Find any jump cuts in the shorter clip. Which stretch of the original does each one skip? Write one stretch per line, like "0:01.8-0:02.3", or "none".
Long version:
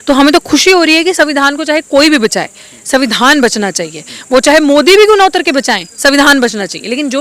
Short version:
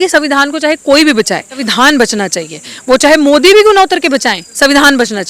0:02.7-0:03.1

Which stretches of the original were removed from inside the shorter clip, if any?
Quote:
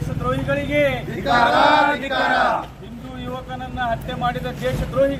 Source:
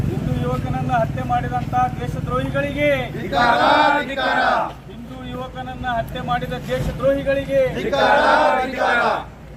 none

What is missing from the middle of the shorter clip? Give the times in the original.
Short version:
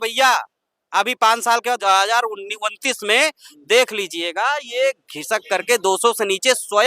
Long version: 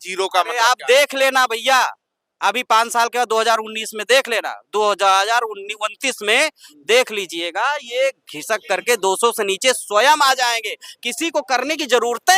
0:03.3-0:05.0

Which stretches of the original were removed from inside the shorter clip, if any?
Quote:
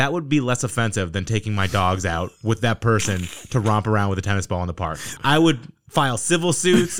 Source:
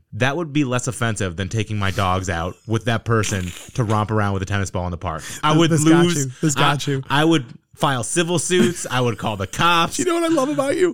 0:05.3-0:06.9

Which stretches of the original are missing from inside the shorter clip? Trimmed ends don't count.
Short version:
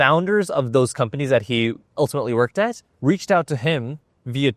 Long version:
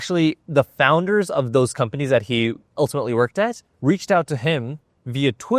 none

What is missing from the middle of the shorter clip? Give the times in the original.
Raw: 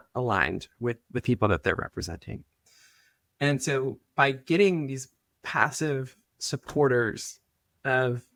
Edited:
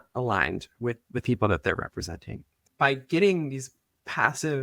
0:02.6-0:04.0

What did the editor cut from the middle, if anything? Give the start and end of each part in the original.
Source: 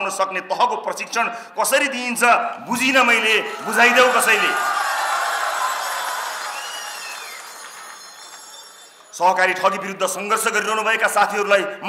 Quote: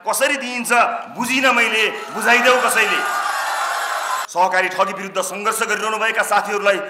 0:05.8-0:09.1

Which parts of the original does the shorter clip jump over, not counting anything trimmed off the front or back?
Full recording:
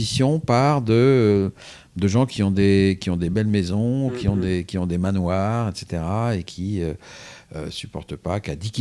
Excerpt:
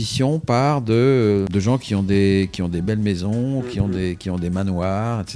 0:01.5-0:02.0

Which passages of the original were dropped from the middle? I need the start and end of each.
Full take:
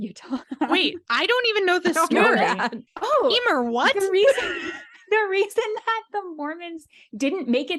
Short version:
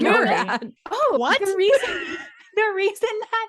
0:03.3-0:03.7

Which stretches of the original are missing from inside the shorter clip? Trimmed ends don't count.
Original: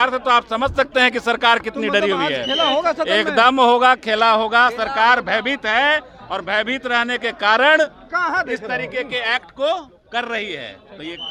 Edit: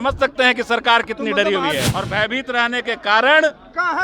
0:02.4-0:06.2

